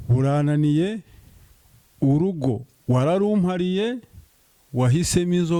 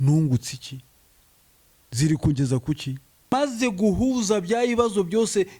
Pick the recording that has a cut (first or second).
second